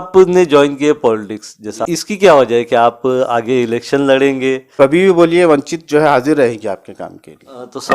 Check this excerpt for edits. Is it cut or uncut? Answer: cut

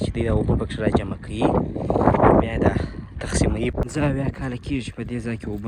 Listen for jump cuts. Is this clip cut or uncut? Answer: cut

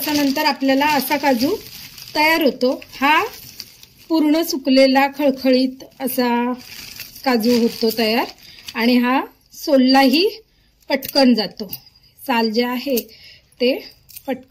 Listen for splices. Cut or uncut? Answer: uncut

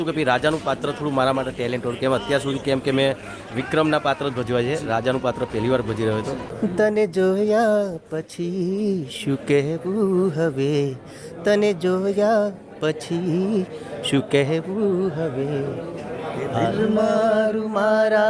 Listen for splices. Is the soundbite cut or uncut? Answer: cut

